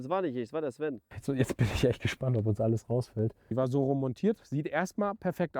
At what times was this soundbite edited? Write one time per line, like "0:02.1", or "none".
0:01.1
0:03.5

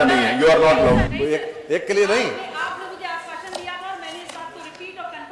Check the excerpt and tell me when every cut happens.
0:01.1

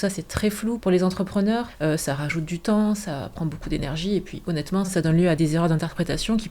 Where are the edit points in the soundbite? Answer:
0:00.8
0:01.7
0:05.3

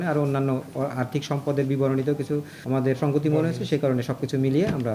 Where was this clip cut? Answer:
0:02.8

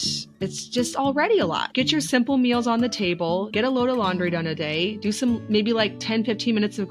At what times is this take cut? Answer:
0:01.6
0:03.5

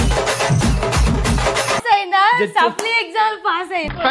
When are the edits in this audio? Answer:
0:01.8

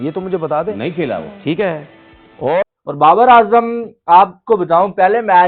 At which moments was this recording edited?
0:02.6

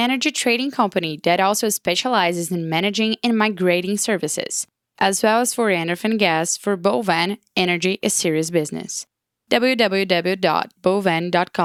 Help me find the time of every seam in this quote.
none

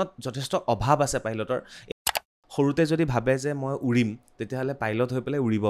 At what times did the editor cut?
0:01.9

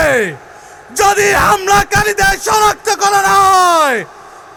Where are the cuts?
none

